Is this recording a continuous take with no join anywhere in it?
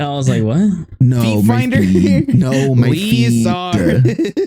yes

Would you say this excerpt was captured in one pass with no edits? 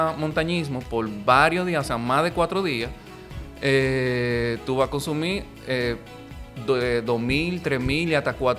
yes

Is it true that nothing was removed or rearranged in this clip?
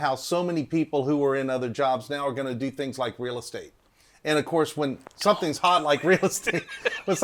yes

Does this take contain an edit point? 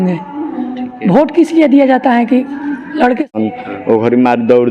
yes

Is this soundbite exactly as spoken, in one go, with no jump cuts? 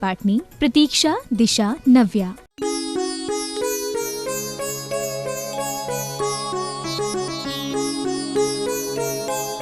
no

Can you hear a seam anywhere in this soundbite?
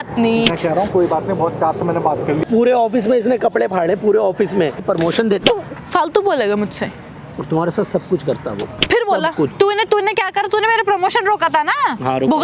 yes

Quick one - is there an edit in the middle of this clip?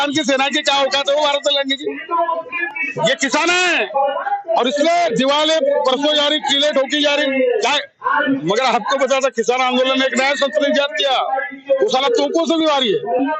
no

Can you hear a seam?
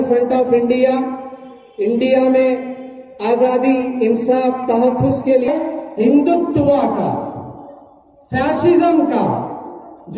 yes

